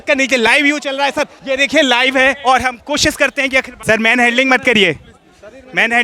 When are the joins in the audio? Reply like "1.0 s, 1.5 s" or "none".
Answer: 1.4 s, 3.7 s